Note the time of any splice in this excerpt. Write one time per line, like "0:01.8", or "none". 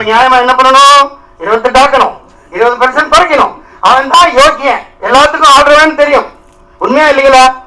none